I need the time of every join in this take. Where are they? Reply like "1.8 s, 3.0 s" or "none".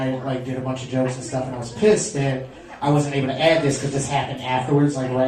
3.9 s